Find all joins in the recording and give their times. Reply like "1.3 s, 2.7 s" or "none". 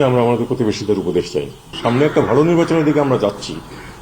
1.7 s

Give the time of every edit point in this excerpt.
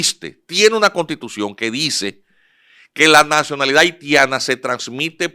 none

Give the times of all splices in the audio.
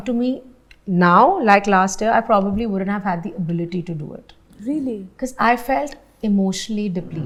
none

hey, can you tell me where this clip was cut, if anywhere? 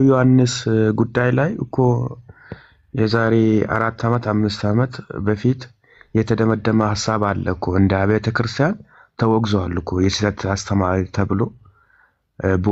none

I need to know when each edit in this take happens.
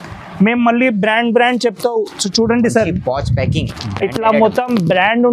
none

